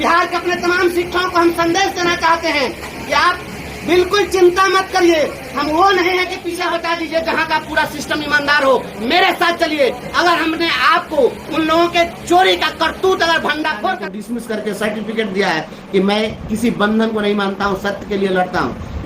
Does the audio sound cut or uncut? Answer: cut